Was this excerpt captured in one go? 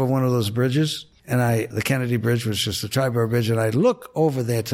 no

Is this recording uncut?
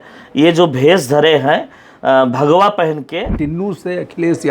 no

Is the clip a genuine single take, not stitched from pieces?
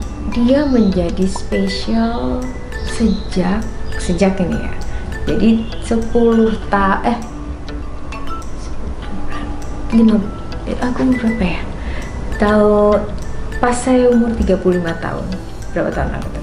yes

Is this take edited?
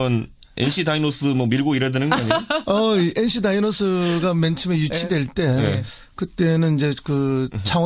yes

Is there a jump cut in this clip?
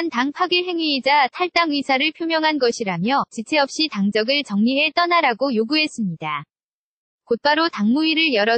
no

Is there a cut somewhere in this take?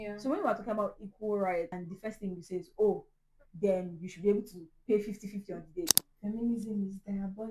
yes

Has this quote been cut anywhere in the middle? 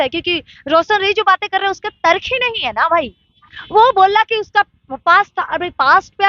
no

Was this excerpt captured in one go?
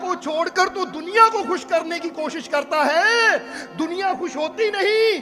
yes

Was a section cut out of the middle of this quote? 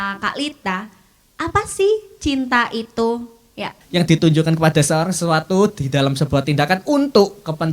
yes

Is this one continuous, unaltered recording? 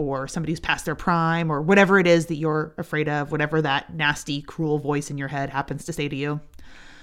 yes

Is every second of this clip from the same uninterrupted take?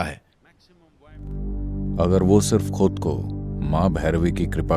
no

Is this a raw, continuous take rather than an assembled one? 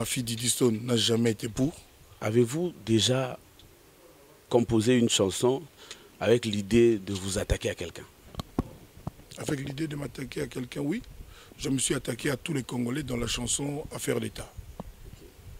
no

